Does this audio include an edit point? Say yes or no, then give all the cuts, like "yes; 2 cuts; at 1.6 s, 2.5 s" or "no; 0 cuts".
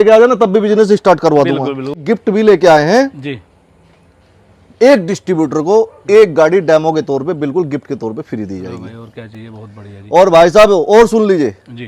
yes; 1 cut; at 2.0 s